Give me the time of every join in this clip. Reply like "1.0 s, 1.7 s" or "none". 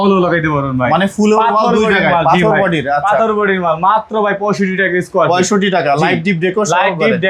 none